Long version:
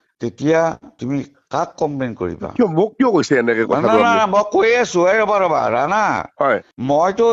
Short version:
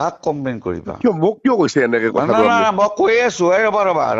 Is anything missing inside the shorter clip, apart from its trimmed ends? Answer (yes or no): no